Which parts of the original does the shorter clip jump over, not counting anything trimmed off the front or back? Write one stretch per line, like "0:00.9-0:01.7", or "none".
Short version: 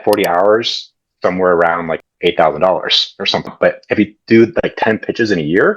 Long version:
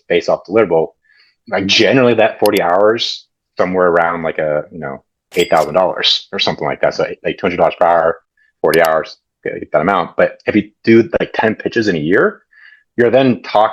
0:04.3-0:05.1
0:06.6-0:10.1